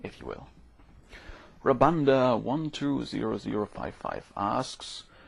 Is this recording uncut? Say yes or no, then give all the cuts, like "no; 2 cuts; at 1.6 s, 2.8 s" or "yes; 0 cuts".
yes; 0 cuts